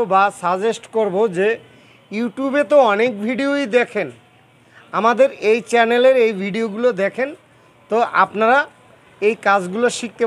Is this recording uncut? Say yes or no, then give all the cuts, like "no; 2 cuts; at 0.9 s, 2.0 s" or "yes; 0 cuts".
yes; 0 cuts